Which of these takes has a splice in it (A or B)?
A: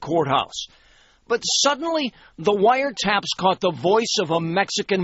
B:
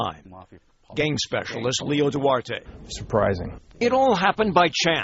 B